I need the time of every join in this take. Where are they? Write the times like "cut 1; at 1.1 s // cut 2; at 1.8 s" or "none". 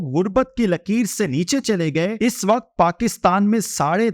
cut 1; at 2.1 s